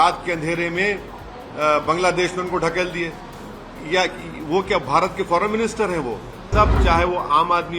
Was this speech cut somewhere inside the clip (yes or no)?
yes